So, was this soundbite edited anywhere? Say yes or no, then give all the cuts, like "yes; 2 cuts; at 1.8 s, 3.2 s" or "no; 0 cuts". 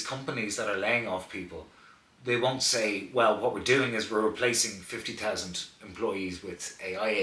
no; 0 cuts